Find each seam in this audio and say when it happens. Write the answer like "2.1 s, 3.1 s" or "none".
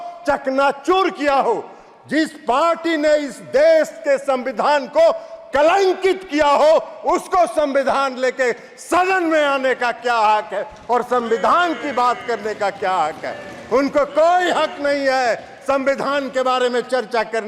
none